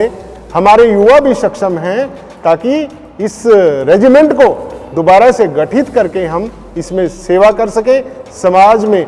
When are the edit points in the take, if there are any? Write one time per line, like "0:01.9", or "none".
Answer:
none